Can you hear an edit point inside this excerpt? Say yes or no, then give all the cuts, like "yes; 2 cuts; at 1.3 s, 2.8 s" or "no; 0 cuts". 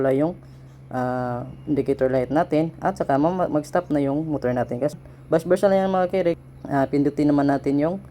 yes; 2 cuts; at 4.9 s, 6.4 s